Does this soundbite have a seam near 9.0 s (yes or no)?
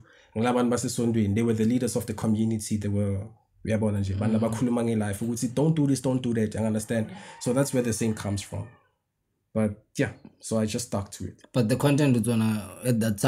no